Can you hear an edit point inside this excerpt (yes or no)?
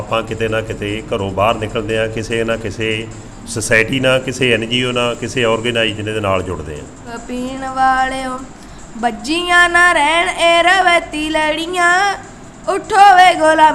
yes